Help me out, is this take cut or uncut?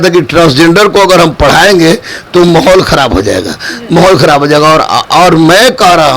uncut